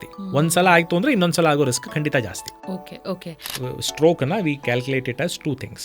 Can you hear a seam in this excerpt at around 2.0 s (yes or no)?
no